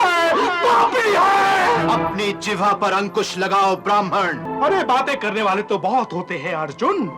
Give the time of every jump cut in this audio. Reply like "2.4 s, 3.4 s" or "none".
1.8 s, 4.4 s

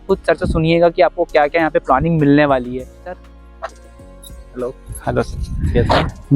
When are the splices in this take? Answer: 3.2 s

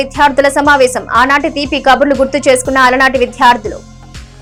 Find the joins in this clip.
none

